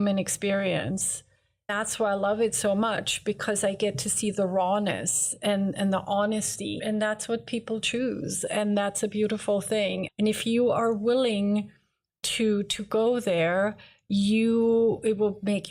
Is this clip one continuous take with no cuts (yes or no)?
no